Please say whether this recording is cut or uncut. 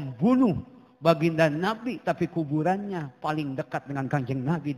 uncut